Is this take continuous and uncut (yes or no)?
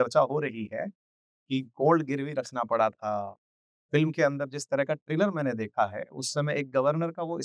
yes